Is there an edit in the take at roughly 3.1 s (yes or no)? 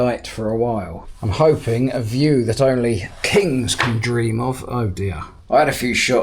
no